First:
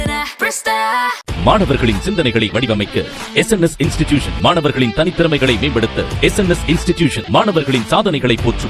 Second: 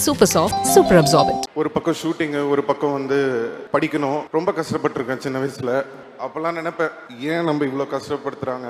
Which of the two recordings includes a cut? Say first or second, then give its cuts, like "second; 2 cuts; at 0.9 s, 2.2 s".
second; 5 cuts; at 1.4 s, 3.6 s, 4.3 s, 6.0 s, 7.1 s